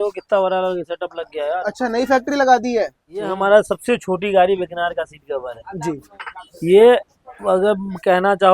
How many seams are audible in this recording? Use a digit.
1